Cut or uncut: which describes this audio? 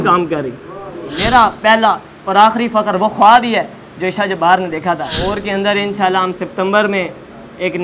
cut